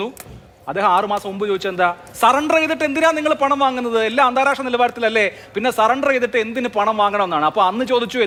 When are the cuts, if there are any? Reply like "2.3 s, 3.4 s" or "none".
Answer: none